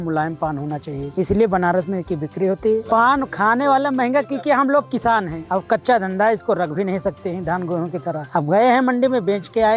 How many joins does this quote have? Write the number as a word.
four